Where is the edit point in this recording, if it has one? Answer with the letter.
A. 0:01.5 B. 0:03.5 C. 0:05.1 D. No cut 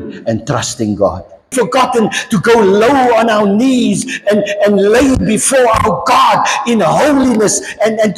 A